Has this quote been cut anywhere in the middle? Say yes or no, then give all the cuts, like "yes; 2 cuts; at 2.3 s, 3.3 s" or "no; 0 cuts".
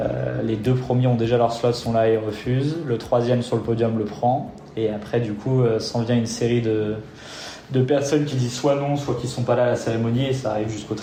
no; 0 cuts